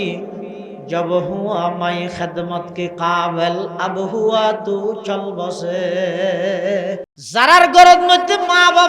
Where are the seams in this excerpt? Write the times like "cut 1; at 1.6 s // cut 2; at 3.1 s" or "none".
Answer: cut 1; at 7.1 s